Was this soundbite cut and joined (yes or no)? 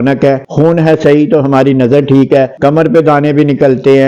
yes